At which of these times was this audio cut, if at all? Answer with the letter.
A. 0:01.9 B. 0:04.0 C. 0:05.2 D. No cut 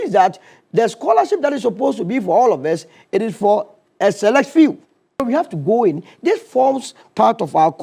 C